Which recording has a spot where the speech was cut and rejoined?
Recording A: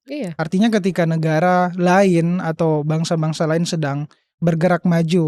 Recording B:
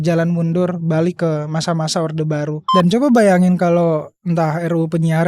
B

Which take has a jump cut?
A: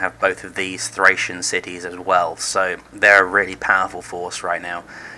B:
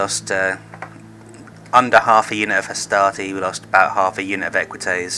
A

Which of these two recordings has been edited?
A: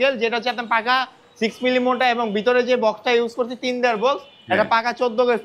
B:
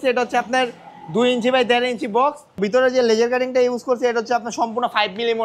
B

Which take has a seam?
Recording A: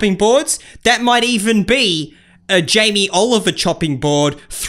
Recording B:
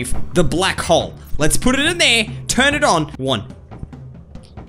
B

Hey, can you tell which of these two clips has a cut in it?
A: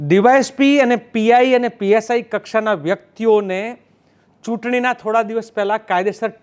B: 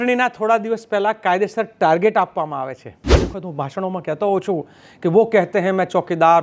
B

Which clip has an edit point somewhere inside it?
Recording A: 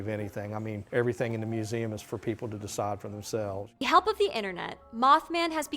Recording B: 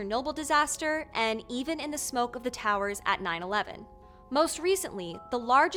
A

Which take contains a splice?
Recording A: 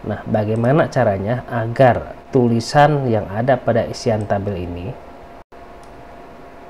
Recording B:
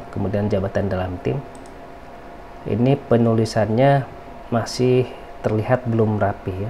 A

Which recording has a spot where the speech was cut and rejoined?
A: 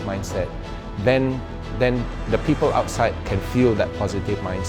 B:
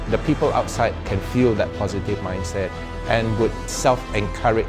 B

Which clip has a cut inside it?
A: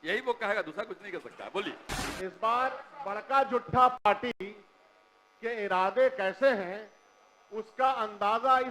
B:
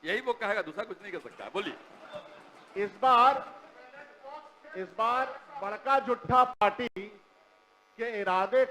A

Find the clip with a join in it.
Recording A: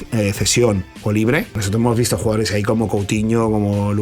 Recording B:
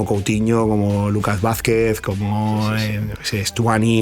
A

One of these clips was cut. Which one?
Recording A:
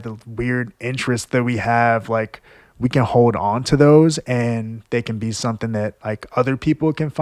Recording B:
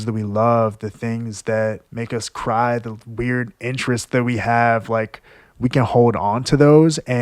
B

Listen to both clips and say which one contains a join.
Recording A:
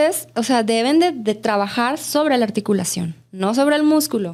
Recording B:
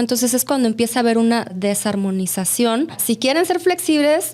B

